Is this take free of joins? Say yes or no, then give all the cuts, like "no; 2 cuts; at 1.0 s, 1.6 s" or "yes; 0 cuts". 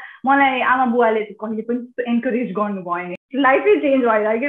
no; 1 cut; at 3.1 s